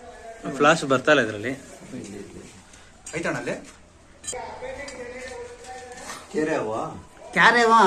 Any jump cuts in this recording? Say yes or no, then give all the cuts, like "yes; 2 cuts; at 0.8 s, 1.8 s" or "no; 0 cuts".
yes; 1 cut; at 4.6 s